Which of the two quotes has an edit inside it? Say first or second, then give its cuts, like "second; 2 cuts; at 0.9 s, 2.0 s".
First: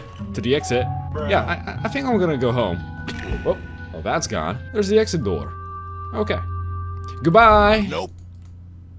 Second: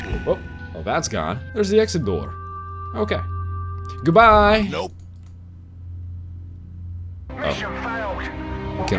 first; 1 cut; at 1.0 s